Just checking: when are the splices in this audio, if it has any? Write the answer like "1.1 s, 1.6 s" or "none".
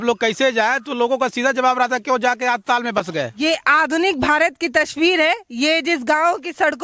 3.4 s